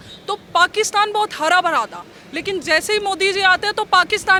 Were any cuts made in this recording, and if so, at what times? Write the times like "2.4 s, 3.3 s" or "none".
none